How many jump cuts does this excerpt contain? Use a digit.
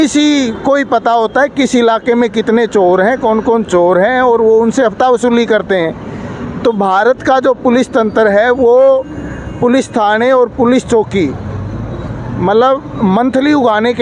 0